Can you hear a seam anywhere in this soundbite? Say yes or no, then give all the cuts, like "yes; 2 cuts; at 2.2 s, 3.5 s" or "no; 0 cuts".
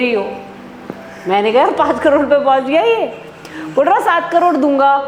no; 0 cuts